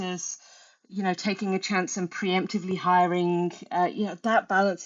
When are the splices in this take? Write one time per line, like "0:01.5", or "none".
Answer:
none